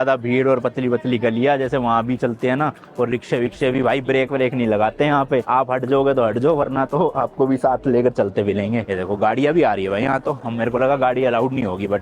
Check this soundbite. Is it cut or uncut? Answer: uncut